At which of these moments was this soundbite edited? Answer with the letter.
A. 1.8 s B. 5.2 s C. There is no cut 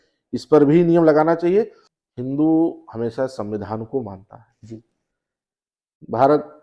A